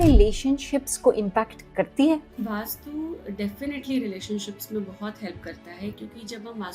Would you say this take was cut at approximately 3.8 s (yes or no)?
no